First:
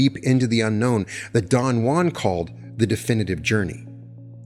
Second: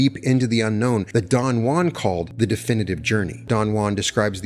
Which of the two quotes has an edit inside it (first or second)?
second